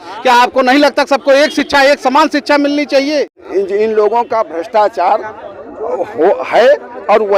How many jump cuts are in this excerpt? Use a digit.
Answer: 1